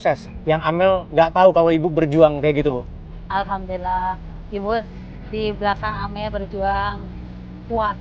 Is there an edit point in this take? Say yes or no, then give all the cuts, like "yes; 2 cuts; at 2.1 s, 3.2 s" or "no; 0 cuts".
no; 0 cuts